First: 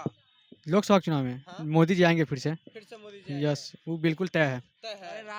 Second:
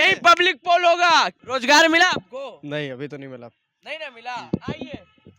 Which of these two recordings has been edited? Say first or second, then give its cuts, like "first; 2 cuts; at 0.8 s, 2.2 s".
second; 1 cut; at 1.4 s